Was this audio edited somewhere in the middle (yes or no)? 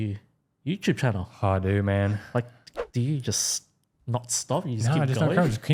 no